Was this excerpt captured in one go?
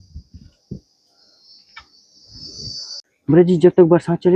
no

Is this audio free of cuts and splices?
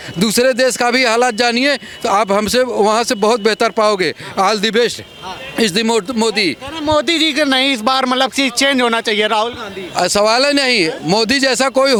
yes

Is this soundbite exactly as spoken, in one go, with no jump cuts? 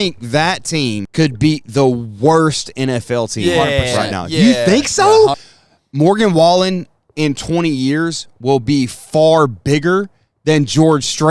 no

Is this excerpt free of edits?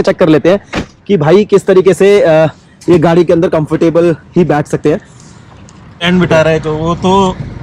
no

